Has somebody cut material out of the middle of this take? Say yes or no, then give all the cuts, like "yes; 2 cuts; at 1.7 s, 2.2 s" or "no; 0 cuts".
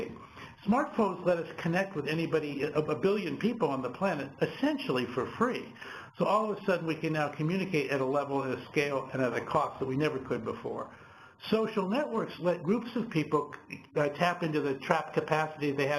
no; 0 cuts